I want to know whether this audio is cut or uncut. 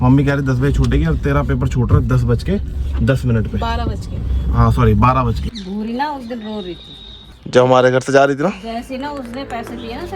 cut